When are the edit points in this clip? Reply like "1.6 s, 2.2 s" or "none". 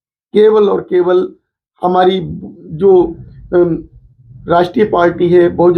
none